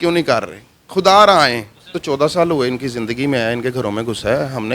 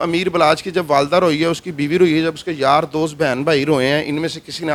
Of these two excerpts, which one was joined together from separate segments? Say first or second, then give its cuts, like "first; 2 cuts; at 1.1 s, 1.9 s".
first; 1 cut; at 2.0 s